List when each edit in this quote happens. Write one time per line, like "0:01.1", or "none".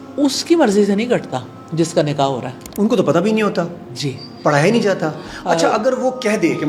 none